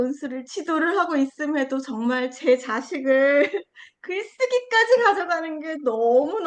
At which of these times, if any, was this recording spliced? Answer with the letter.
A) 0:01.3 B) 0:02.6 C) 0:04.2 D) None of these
D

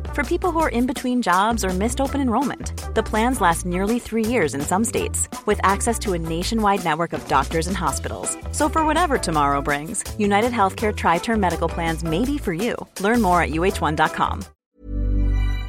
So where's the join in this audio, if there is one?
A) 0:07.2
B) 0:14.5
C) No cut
B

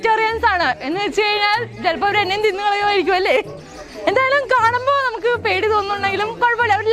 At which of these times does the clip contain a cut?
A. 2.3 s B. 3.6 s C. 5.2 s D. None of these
D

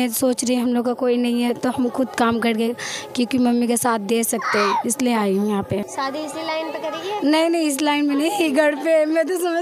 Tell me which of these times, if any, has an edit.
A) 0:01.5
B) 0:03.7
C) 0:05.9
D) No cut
C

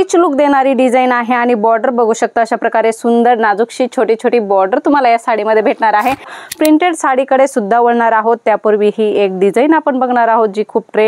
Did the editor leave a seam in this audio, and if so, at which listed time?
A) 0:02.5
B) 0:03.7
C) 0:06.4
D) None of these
C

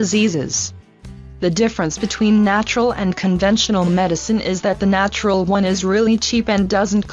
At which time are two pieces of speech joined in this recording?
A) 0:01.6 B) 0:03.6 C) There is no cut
B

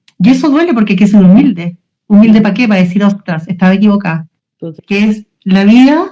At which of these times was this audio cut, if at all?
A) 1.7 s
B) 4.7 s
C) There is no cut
B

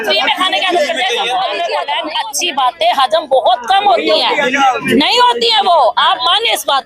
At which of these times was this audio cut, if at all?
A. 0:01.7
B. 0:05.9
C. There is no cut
A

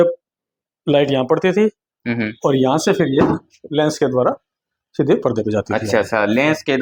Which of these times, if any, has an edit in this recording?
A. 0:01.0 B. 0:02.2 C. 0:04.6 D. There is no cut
D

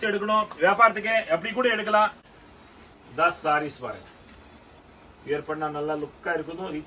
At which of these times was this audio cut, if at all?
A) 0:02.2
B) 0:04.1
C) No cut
A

